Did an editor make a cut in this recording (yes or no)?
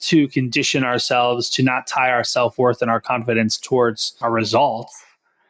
yes